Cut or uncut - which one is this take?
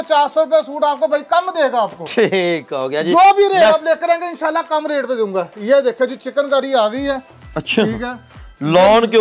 uncut